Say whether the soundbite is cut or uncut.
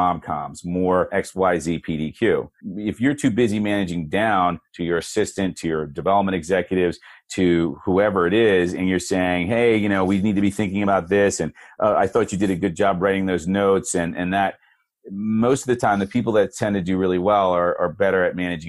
cut